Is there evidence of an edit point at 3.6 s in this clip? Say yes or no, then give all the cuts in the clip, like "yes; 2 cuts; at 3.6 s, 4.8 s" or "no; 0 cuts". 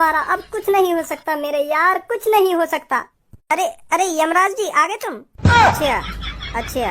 yes; 1 cut; at 3.6 s